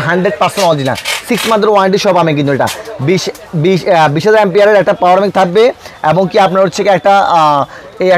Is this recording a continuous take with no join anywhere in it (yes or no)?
yes